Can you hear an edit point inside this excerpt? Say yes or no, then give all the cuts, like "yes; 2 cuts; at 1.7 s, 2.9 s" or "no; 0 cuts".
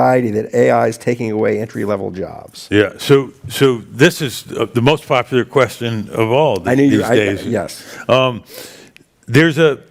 no; 0 cuts